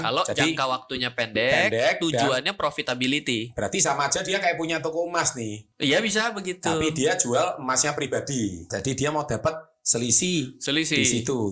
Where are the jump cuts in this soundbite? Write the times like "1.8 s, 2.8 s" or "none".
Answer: 8.7 s